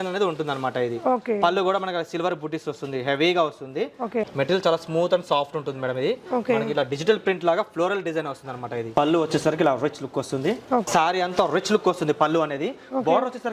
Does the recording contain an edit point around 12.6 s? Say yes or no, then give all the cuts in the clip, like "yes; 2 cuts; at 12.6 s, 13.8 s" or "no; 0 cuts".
no; 2 cuts; at 4.3 s, 10.8 s